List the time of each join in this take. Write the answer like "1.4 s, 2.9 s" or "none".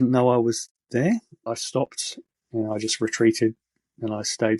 1.4 s